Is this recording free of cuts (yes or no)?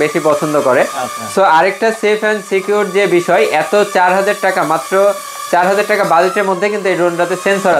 yes